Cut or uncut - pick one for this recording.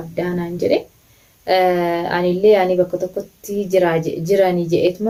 uncut